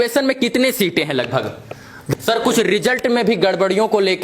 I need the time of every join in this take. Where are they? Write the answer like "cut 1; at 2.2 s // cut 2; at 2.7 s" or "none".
cut 1; at 2.1 s

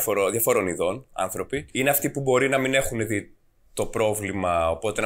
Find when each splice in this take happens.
cut 1; at 1.7 s

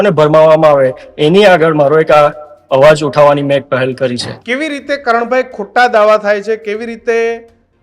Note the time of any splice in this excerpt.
cut 1; at 4.3 s

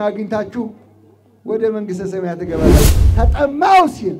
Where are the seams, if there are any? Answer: cut 1; at 3.0 s

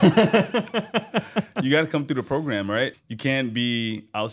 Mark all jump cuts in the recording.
cut 1; at 3.0 s

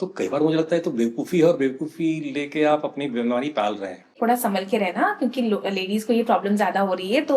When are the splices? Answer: cut 1; at 4.1 s

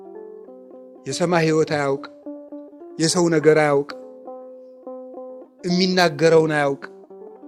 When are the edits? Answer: cut 1; at 1.0 s

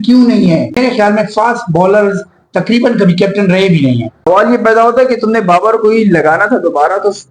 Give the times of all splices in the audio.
cut 1; at 0.8 s // cut 2; at 4.1 s

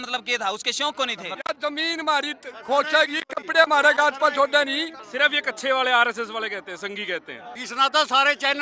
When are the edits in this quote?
cut 1; at 1.3 s // cut 2; at 5.0 s // cut 3; at 7.6 s

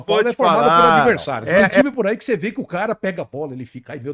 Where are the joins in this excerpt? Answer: cut 1; at 1.8 s

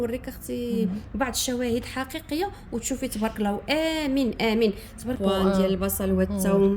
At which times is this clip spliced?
cut 1; at 5.2 s

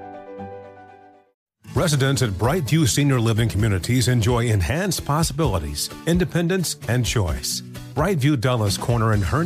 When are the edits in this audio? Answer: cut 1; at 1.4 s

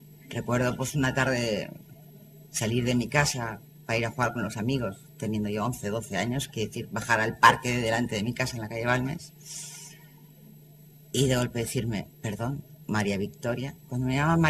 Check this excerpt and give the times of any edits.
cut 1; at 5.8 s

